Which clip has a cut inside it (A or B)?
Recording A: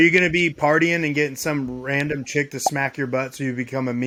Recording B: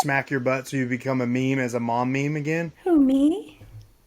B